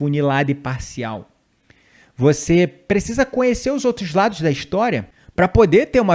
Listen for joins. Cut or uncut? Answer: cut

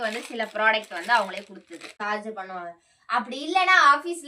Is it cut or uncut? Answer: cut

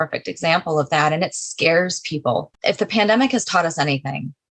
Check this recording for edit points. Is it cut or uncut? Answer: cut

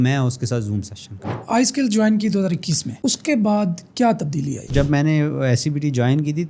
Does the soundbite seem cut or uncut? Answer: cut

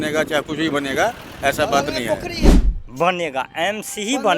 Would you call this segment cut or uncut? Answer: cut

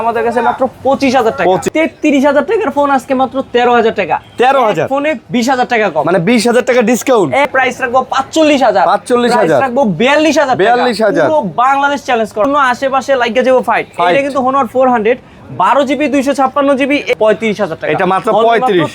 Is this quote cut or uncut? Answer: cut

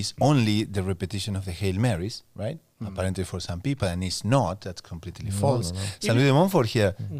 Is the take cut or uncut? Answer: uncut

